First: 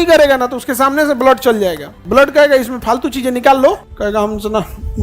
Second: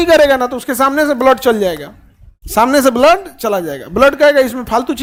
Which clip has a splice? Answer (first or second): first